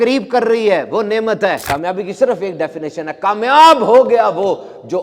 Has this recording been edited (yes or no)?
yes